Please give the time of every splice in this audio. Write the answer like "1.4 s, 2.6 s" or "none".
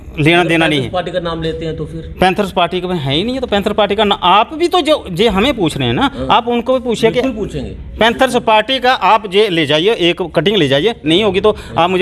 none